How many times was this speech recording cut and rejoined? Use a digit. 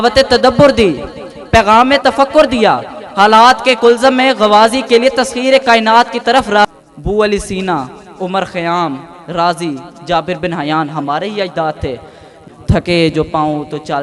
2